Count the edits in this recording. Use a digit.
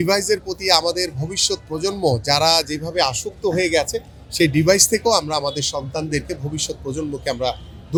0